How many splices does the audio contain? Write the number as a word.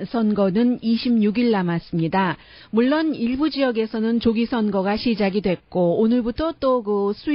one